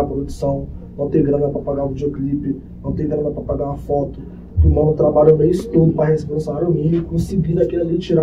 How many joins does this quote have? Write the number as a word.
zero